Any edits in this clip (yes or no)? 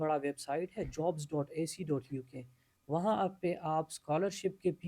no